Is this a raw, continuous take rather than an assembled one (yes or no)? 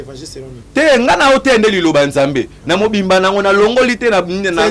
yes